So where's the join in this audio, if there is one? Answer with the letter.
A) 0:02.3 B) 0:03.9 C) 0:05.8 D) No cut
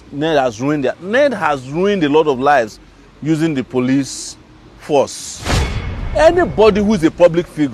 C